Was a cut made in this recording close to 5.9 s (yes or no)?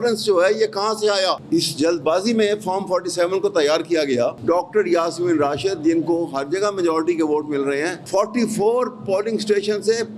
no